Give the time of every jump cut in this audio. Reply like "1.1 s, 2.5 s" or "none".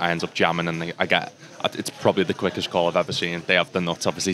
none